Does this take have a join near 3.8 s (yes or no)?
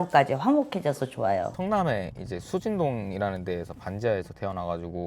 no